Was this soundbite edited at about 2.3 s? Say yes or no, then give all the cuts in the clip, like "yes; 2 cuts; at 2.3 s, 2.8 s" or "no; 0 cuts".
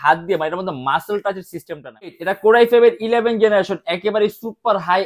yes; 1 cut; at 2.3 s